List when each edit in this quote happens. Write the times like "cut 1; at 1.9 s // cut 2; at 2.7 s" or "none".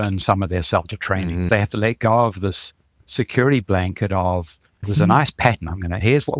cut 1; at 1.5 s